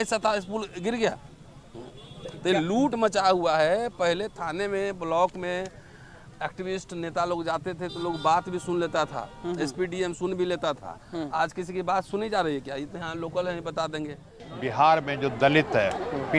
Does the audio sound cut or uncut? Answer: cut